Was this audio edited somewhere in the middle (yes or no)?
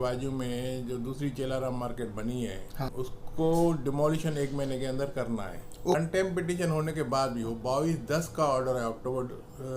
yes